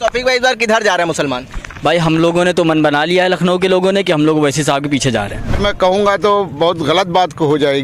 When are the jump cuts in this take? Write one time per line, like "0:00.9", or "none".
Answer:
0:05.6